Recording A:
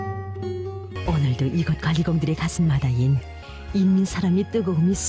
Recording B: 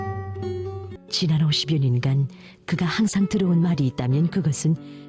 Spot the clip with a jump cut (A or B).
A